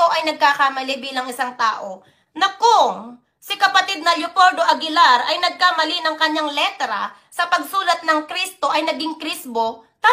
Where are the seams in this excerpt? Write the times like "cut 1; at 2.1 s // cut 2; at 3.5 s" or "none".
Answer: none

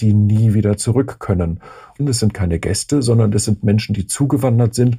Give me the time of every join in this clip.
cut 1; at 2.0 s

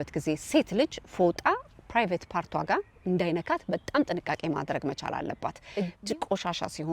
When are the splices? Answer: cut 1; at 5.6 s

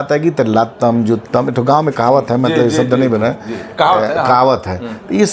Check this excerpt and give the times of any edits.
none

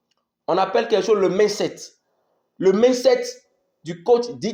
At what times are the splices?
none

